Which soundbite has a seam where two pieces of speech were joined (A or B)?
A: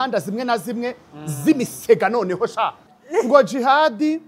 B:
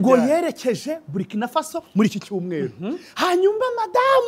A